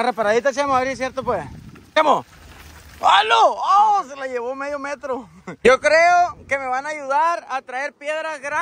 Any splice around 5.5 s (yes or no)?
yes